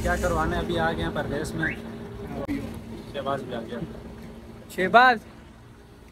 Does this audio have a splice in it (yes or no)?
yes